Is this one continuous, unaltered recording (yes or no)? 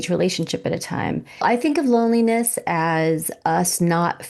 no